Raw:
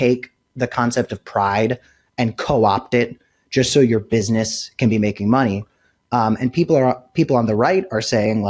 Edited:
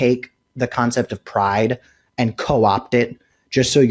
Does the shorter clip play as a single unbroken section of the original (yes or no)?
yes